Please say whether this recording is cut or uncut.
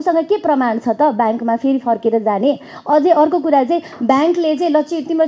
uncut